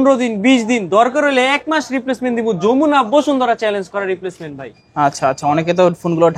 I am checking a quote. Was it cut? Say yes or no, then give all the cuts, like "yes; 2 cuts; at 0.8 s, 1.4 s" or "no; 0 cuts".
no; 0 cuts